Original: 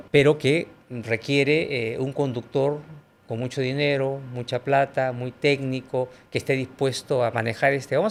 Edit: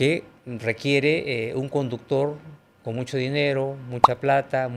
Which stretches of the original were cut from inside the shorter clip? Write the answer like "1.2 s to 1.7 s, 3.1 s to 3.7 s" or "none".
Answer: none